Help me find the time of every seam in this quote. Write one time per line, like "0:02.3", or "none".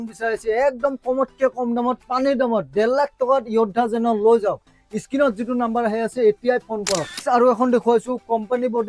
0:07.1

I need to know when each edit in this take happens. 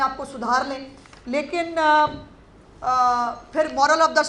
none

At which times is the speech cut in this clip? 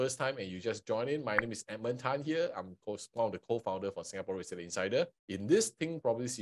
0:05.2

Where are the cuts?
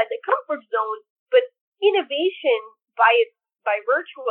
0:01.6

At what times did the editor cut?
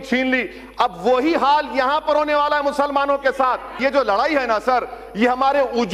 0:03.7

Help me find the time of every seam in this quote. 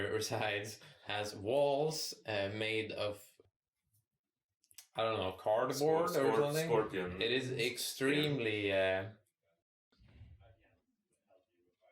0:03.4

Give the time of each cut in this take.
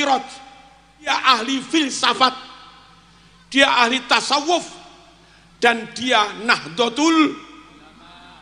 0:01.1

